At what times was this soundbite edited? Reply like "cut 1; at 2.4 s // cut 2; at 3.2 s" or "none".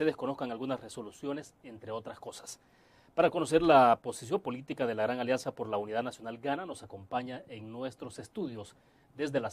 cut 1; at 4.6 s